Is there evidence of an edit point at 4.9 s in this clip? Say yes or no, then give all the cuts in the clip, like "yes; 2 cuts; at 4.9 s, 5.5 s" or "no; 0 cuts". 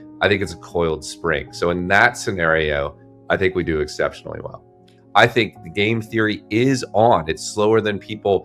yes; 1 cut; at 4.9 s